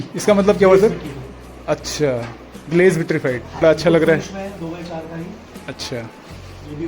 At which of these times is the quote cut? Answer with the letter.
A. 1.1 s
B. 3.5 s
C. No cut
B